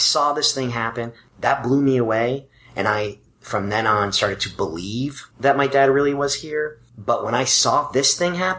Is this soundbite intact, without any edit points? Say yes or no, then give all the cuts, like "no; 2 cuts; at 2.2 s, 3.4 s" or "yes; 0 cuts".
no; 3 cuts; at 1.2 s, 5.2 s, 6.9 s